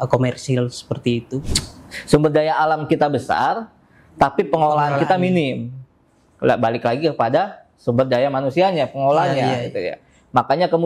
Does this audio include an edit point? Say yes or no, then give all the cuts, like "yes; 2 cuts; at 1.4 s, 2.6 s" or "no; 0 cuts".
yes; 1 cut; at 1.6 s